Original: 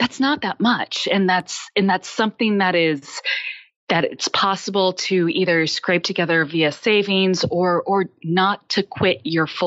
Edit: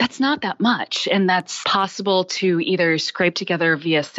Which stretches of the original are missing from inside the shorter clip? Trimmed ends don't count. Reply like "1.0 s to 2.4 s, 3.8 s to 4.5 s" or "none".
1.6 s to 4.3 s